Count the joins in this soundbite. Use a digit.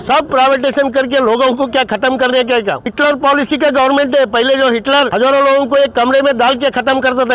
2